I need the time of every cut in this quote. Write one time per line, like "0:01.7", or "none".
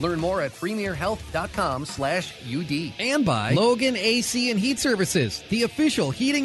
0:03.3